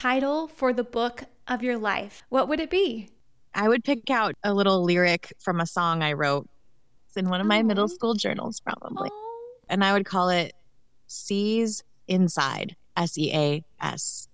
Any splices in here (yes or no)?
yes